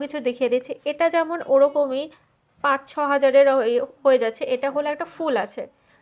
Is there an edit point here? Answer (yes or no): no